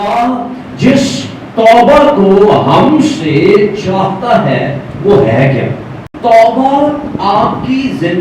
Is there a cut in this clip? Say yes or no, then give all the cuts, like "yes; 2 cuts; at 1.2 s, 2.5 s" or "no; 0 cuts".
yes; 1 cut; at 6.1 s